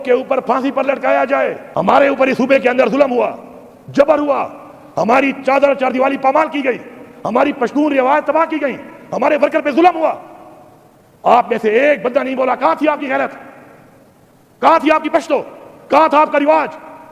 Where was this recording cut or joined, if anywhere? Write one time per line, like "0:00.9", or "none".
0:01.8